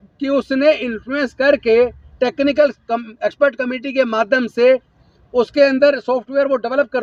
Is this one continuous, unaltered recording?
yes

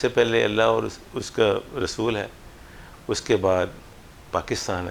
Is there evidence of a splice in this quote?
no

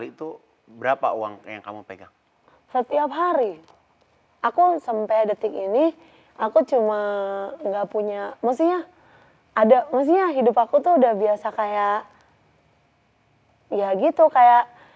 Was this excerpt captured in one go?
yes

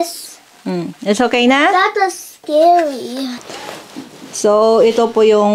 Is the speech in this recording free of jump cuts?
no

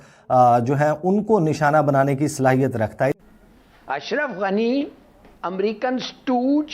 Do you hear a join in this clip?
yes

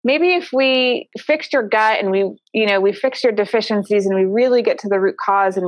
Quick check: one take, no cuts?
no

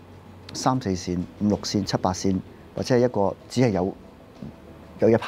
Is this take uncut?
yes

